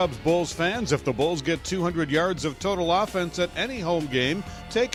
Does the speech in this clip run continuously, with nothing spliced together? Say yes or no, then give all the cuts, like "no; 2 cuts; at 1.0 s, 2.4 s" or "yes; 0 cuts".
yes; 0 cuts